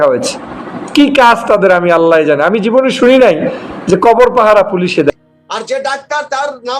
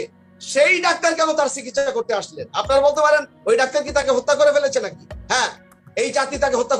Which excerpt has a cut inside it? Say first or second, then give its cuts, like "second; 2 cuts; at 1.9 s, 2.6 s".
first; 1 cut; at 5.1 s